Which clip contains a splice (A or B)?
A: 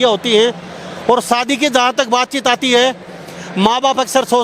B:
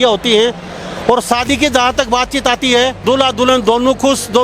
B